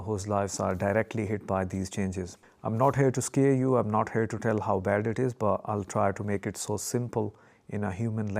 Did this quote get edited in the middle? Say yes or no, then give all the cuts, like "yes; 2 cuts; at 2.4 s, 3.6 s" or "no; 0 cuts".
yes; 1 cut; at 2.4 s